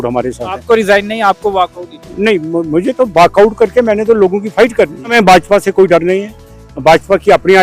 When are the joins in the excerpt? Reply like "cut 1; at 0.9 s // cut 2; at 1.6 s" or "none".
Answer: cut 1; at 5.1 s